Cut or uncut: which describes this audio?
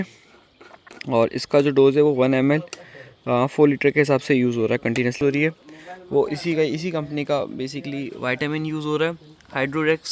cut